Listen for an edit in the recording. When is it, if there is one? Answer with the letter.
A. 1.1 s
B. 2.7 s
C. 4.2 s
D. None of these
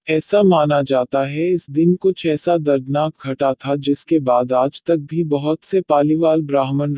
A